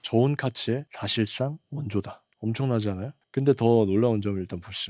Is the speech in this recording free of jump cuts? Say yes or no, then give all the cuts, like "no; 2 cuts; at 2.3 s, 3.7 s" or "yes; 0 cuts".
no; 3 cuts; at 0.9 s, 2.1 s, 3.2 s